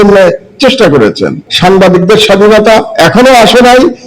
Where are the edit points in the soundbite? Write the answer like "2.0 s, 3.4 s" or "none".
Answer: 1.4 s